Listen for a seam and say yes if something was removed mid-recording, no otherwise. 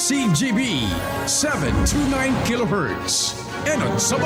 no